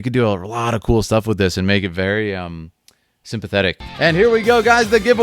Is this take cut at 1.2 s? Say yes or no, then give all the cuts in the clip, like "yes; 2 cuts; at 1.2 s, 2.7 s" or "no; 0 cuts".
no; 1 cut; at 3.8 s